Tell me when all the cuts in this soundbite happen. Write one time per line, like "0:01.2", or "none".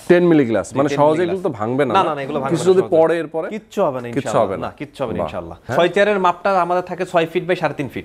0:05.7